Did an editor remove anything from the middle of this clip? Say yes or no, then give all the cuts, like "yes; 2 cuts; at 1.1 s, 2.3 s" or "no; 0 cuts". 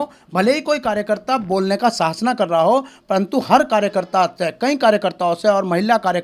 no; 0 cuts